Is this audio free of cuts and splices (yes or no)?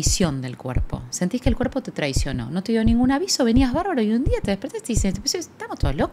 yes